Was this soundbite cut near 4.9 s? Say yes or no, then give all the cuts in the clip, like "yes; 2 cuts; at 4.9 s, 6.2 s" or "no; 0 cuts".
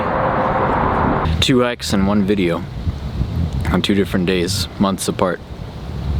no; 1 cut; at 1.2 s